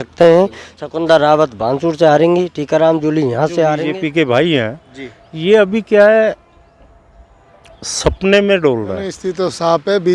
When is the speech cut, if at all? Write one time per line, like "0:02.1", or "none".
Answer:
0:03.8
0:09.2